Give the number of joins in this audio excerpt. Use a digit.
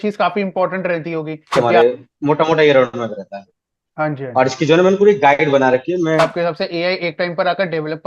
2